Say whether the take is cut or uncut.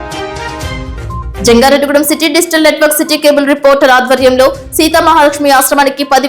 cut